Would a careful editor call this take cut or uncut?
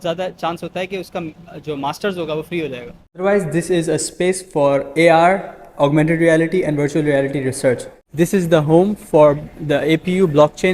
cut